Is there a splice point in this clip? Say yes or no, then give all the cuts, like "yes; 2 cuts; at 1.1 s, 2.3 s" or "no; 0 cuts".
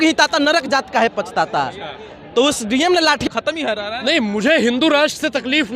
yes; 1 cut; at 3.3 s